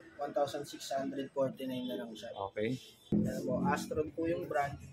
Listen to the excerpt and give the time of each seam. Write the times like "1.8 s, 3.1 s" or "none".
3.1 s